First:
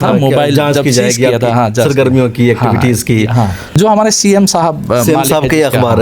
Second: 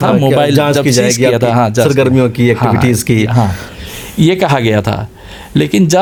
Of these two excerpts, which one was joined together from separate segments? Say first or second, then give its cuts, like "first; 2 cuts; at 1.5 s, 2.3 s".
first; 1 cut; at 3.6 s